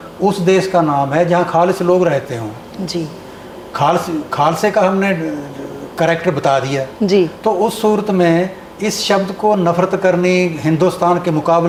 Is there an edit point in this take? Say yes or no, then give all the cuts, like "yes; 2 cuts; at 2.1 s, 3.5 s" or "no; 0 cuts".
no; 0 cuts